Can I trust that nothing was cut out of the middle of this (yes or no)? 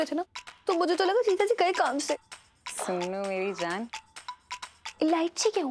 yes